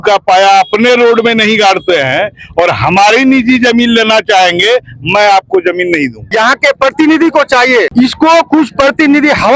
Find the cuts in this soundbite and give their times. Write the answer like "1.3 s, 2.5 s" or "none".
6.2 s, 7.9 s